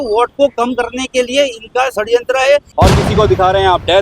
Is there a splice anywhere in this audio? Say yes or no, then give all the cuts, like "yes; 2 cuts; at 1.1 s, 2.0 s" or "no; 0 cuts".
yes; 1 cut; at 2.7 s